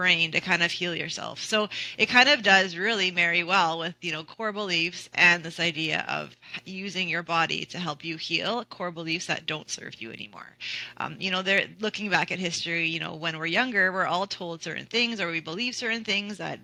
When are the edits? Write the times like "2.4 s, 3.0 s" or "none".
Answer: none